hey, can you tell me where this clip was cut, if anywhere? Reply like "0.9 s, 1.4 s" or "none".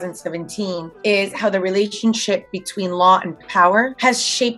none